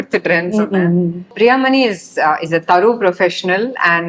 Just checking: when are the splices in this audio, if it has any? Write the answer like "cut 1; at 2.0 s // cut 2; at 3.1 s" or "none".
cut 1; at 1.3 s